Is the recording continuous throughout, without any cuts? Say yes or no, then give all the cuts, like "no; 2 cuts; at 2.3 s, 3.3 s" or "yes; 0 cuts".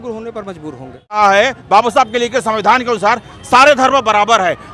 no; 1 cut; at 1.2 s